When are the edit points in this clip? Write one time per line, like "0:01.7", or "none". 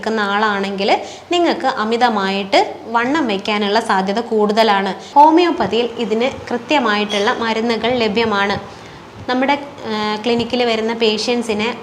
0:05.0